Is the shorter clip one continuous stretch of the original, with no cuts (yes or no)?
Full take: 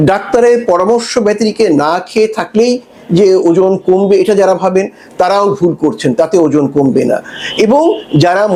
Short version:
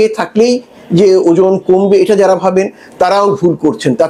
yes